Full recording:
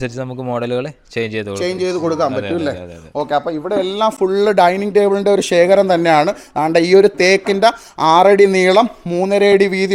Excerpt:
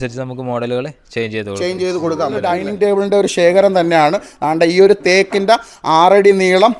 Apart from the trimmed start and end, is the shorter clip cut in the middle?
yes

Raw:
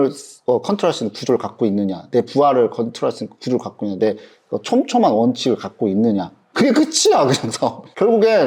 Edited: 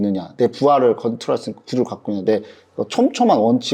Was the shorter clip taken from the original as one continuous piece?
yes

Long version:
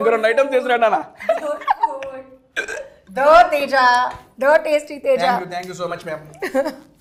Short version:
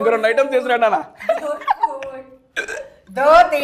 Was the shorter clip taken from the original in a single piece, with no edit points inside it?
yes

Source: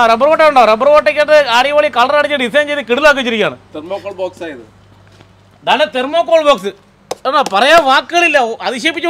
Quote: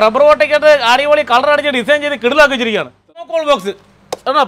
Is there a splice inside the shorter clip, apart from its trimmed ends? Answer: yes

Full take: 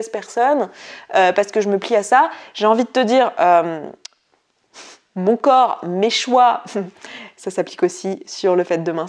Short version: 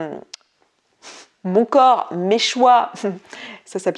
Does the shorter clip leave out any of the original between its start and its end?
no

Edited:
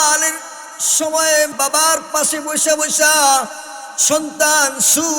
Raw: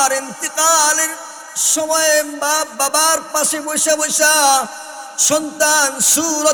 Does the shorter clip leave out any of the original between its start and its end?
yes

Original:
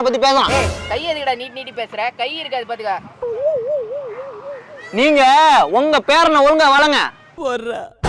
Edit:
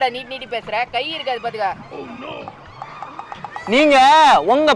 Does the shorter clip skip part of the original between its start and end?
no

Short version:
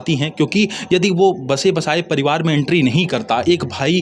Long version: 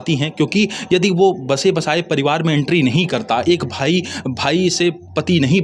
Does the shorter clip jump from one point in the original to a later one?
no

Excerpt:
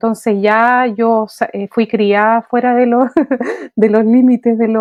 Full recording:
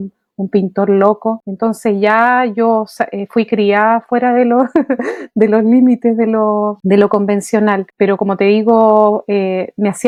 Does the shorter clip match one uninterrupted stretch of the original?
yes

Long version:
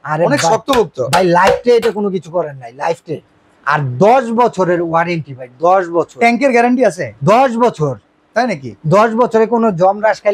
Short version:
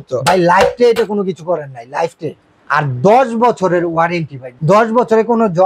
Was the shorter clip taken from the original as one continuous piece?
no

